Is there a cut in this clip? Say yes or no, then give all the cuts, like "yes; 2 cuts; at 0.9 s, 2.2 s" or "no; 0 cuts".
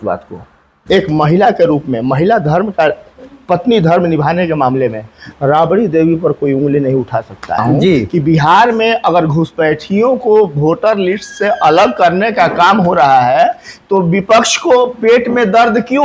yes; 1 cut; at 7.6 s